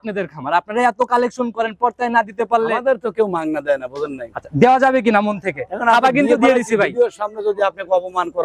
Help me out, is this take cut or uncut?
uncut